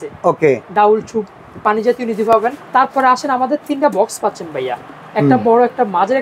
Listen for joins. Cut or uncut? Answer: cut